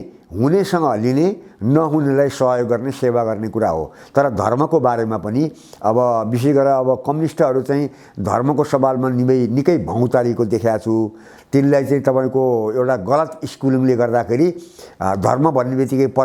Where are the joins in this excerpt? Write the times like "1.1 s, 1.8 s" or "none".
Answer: none